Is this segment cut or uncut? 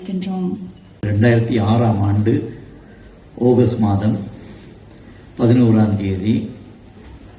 cut